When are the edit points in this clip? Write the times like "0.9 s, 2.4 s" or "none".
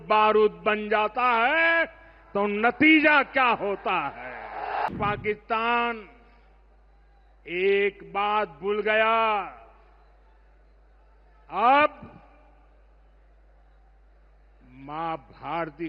4.9 s